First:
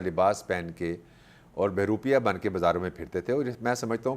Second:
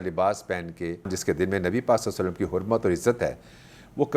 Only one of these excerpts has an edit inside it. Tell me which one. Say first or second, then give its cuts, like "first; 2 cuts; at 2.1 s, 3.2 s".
second; 1 cut; at 1.2 s